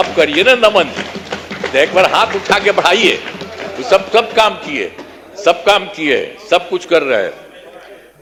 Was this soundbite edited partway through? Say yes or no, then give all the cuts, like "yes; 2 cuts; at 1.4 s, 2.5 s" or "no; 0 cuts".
no; 0 cuts